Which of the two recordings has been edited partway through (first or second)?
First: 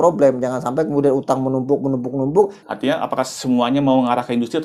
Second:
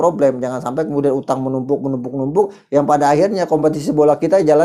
first